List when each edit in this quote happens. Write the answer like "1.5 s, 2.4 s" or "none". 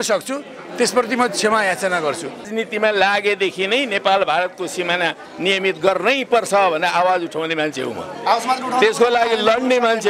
2.4 s